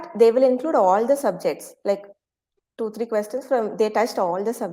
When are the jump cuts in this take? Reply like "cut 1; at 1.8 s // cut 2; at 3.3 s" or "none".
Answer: none